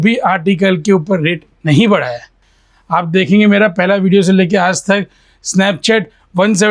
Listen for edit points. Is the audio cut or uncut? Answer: uncut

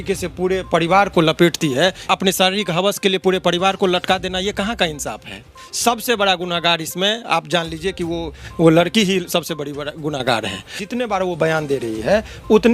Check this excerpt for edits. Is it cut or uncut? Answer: cut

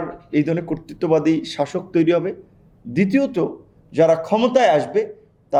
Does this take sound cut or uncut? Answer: uncut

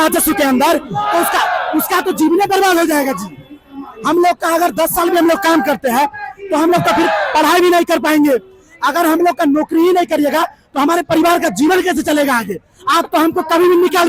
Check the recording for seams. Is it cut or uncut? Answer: uncut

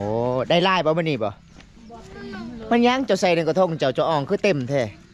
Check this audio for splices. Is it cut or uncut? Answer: uncut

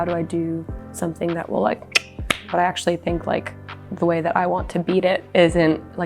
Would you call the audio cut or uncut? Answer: cut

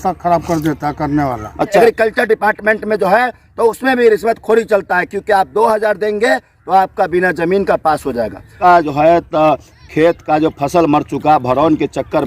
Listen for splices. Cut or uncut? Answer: cut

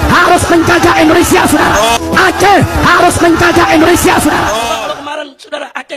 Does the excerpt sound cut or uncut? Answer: cut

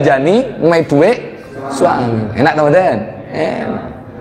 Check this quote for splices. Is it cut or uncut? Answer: uncut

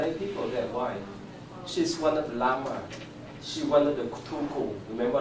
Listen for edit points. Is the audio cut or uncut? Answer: cut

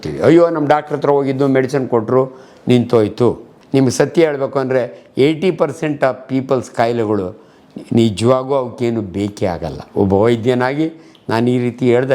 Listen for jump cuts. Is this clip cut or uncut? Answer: cut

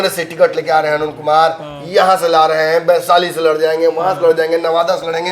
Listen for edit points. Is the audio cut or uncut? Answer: uncut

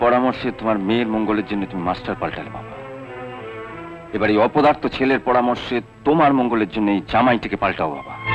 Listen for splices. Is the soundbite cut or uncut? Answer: uncut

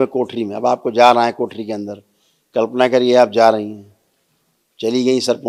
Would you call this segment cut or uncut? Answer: uncut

